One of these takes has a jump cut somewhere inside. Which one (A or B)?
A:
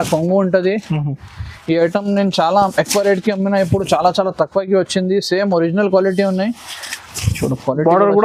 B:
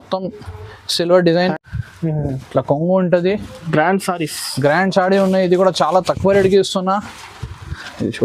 B